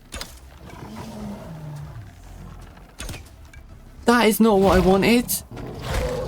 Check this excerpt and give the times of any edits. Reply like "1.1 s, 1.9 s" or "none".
4.0 s, 5.4 s